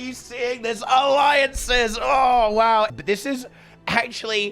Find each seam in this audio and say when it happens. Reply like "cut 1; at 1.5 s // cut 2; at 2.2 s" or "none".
cut 1; at 3.0 s